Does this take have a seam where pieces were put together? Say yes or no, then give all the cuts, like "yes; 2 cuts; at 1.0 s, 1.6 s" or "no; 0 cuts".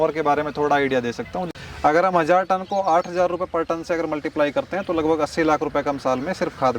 yes; 1 cut; at 1.5 s